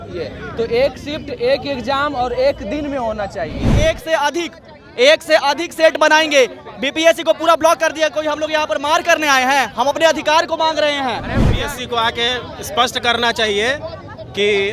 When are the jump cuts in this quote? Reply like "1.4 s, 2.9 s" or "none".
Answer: 3.7 s, 11.6 s